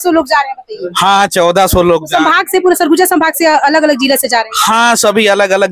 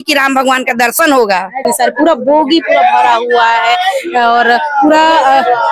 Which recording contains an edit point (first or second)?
second